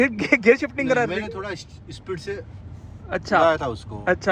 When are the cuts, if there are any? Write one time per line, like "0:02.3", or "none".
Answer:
none